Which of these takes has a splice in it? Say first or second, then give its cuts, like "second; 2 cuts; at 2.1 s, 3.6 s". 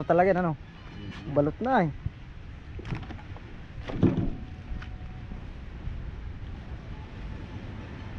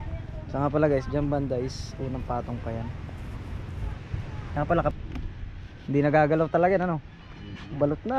second; 1 cut; at 4.9 s